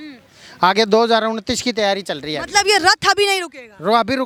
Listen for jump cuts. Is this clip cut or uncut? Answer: uncut